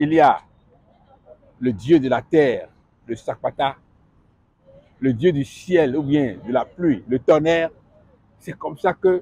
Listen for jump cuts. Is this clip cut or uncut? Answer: uncut